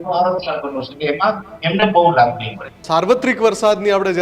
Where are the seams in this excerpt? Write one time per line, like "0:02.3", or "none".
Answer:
0:02.8

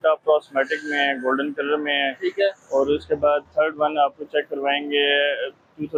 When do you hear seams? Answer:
none

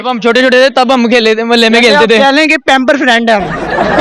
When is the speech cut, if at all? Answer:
none

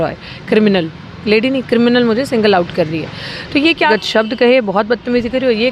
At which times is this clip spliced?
0:03.9

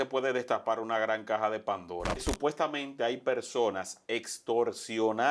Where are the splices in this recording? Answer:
0:02.2

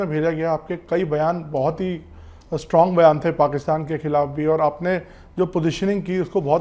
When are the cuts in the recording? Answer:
none

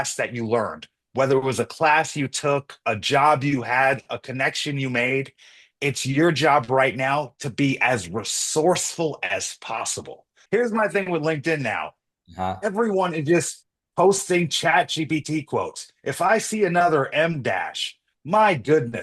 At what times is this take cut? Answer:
0:10.3

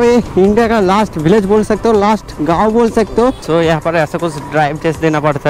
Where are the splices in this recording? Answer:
0:03.5

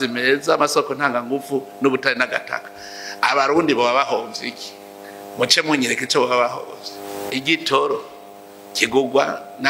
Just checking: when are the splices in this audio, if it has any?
0:07.1

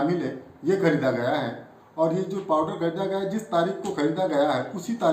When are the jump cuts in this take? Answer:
none

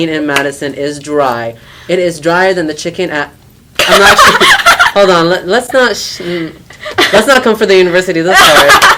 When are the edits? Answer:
none

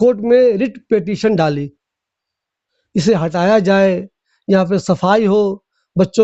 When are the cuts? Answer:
none

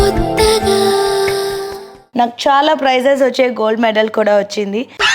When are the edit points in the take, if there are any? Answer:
0:02.0

